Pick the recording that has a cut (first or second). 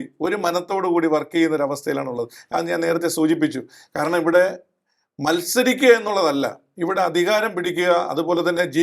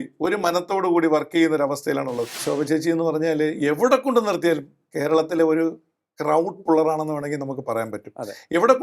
second